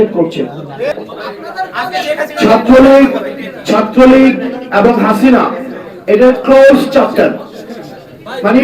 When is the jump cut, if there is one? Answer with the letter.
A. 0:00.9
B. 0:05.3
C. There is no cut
A